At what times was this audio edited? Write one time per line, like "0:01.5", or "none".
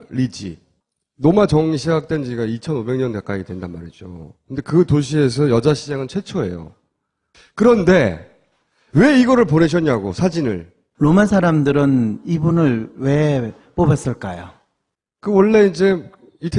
none